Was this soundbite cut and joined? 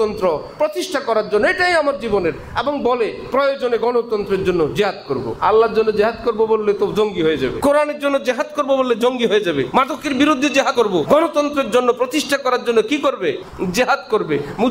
yes; 5 cuts; at 5.3 s, 7.6 s, 9.7 s, 10.8 s, 13.5 s

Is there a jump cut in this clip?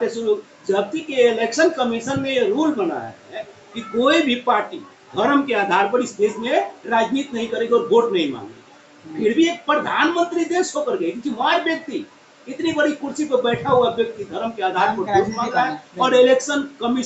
no; 0 cuts

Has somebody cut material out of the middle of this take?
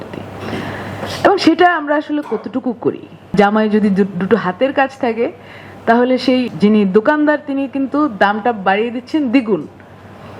yes; 2 cuts; at 3.3 s, 6.5 s

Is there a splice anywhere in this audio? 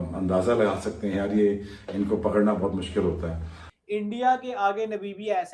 yes; 1 cut; at 3.7 s

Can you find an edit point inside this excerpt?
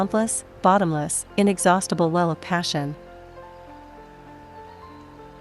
yes; 1 cut; at 3.0 s

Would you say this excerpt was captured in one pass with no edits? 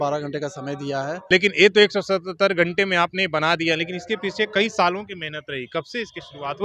no; 1 cut; at 1.2 s

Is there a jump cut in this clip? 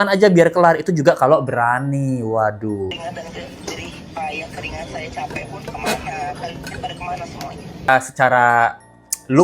yes; 2 cuts; at 3.0 s, 7.9 s

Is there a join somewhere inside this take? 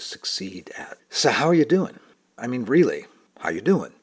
yes; 1 cut; at 2.3 s

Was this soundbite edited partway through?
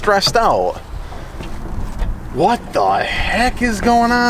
yes; 1 cut; at 1.5 s

